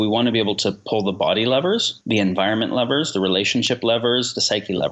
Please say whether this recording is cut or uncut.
uncut